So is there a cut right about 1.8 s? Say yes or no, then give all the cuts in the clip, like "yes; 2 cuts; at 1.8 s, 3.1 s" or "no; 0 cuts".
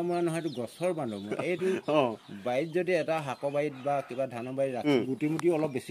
no; 1 cut; at 4.8 s